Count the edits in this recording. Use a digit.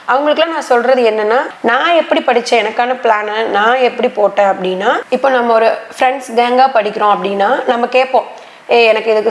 2